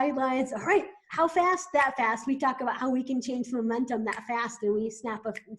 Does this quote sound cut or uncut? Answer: cut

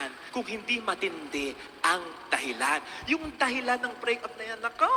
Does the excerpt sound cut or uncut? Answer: uncut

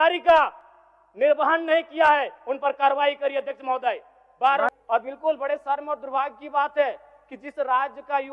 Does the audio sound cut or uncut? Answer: cut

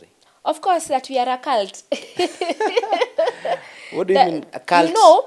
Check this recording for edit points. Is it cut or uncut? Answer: uncut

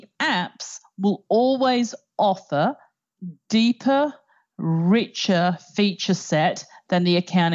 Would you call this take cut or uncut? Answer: uncut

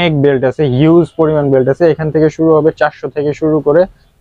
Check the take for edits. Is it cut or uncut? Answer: uncut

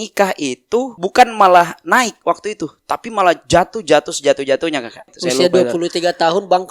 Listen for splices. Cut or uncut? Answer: cut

